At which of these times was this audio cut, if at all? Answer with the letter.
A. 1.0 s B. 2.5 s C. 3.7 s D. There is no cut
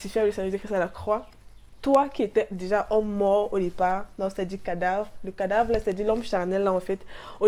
D